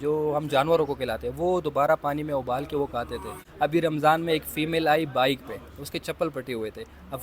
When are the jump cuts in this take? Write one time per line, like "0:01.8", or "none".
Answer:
0:03.4